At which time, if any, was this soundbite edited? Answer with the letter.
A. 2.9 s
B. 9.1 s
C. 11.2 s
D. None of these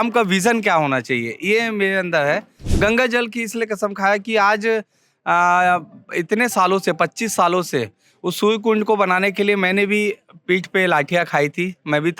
A